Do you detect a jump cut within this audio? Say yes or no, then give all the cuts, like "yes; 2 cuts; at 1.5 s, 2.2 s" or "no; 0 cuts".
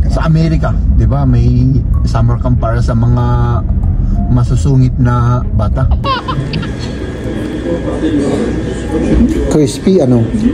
yes; 1 cut; at 6.0 s